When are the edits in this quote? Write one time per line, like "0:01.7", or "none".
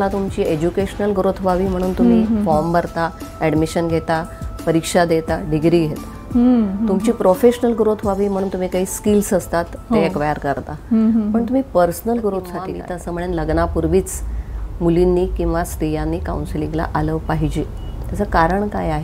0:13.0